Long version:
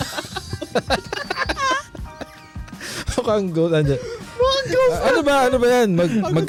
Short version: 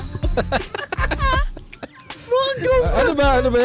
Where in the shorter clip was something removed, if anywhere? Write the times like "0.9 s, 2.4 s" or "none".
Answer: 2.1 s